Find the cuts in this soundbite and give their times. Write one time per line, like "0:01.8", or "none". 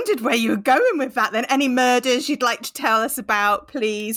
none